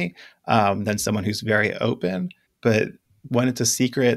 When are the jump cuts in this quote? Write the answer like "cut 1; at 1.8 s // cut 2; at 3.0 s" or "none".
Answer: cut 1; at 2.4 s // cut 2; at 3.1 s